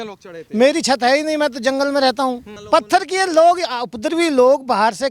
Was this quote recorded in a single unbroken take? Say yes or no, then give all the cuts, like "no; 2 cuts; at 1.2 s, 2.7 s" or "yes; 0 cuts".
no; 1 cut; at 2.5 s